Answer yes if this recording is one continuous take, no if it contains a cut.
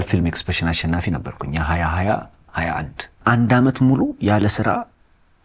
no